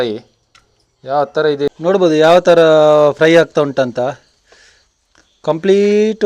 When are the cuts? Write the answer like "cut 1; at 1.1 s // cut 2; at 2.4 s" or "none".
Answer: cut 1; at 1.7 s